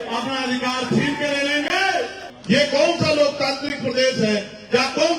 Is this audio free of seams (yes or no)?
no